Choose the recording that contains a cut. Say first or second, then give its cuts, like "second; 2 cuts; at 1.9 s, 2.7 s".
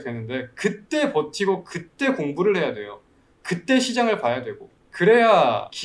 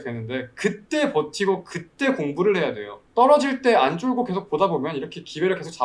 second; 1 cut; at 2.9 s